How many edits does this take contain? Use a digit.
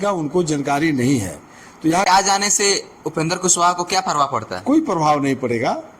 1